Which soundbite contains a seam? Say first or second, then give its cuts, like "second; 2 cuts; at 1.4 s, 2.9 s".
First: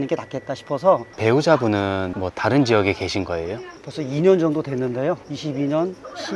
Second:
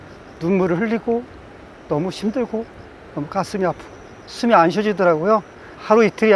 first; 3 cuts; at 1.1 s, 3.8 s, 5.3 s